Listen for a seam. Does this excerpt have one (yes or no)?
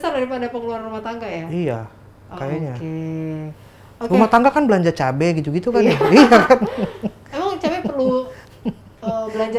no